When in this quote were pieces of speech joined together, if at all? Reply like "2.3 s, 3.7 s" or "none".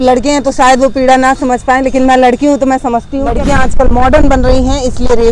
3.3 s

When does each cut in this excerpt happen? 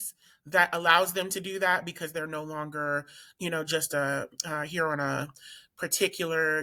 none

